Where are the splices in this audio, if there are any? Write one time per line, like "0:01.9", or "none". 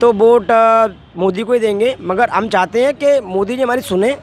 none